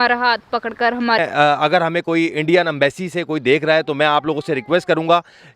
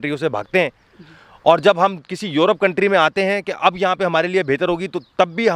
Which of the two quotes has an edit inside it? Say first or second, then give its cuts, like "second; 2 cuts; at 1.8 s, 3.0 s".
first; 1 cut; at 1.2 s